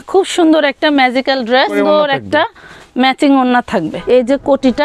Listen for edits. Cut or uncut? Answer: cut